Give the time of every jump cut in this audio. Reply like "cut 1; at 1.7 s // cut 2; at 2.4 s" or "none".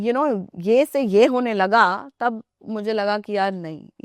none